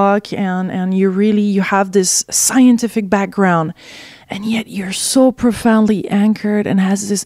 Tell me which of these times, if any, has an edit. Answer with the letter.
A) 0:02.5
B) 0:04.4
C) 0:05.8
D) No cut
C